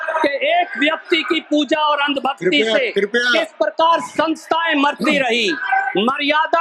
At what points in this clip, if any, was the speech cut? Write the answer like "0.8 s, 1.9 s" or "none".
none